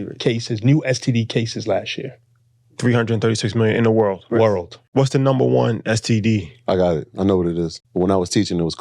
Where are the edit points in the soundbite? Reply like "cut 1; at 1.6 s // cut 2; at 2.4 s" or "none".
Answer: cut 1; at 4.8 s // cut 2; at 7.8 s